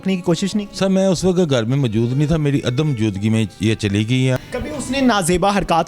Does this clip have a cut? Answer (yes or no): yes